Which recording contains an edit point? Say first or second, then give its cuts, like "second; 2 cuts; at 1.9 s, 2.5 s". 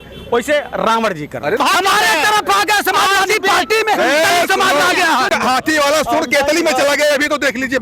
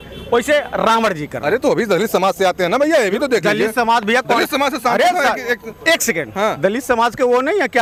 first; 2 cuts; at 1.6 s, 5.3 s